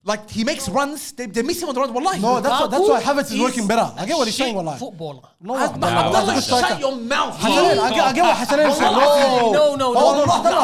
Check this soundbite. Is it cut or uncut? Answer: uncut